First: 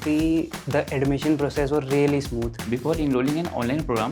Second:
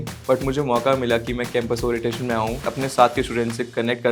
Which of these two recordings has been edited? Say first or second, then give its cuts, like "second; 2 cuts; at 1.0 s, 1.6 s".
first; 1 cut; at 2.6 s